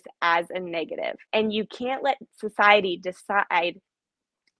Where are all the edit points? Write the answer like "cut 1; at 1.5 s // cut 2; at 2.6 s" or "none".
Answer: cut 1; at 1.2 s